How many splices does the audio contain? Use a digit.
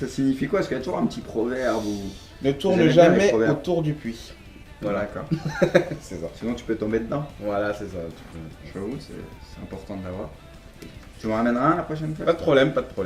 1